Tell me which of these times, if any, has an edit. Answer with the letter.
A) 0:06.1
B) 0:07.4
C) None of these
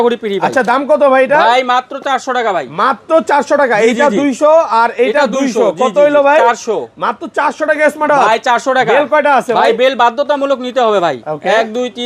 C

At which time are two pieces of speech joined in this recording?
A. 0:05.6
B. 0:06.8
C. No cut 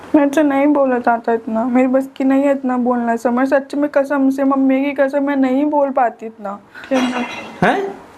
B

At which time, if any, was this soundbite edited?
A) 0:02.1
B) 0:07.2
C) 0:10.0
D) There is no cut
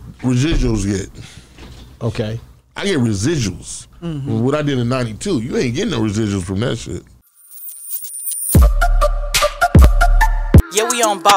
B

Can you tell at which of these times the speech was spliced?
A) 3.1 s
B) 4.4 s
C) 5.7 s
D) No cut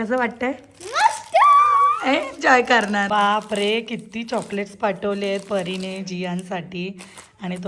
A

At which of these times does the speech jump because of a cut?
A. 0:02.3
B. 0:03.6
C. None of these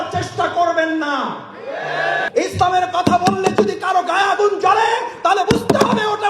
A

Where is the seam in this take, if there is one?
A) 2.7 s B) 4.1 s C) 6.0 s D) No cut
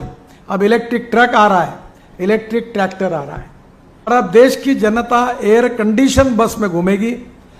B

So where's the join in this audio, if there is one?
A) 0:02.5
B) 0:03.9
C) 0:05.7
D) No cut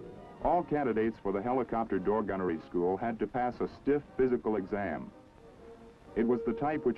B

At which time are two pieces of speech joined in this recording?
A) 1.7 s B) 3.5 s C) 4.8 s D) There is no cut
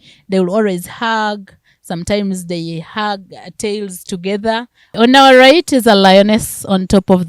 C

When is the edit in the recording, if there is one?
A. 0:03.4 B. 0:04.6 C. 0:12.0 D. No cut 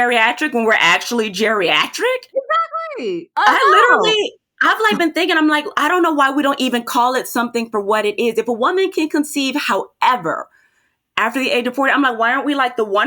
A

